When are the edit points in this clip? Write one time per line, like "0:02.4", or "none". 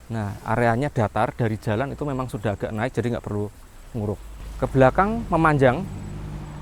0:04.4